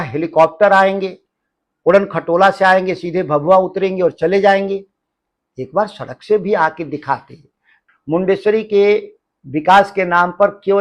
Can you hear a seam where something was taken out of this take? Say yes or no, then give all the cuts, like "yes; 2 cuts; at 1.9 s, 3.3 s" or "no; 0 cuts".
yes; 1 cut; at 7.7 s